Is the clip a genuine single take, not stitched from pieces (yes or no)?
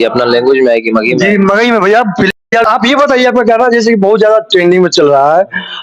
no